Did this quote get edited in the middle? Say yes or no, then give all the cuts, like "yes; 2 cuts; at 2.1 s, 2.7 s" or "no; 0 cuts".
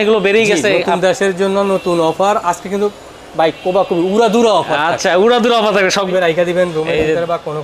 yes; 1 cut; at 6.1 s